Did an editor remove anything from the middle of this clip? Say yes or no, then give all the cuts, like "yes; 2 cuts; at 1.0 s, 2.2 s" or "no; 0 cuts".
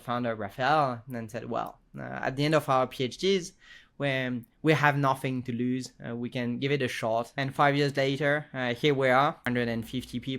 yes; 2 cuts; at 7.4 s, 9.4 s